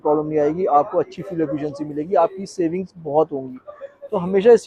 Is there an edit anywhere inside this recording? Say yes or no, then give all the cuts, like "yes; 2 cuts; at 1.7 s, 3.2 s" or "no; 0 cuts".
no; 0 cuts